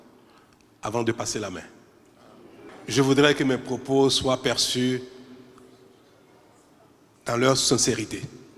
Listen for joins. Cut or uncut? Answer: cut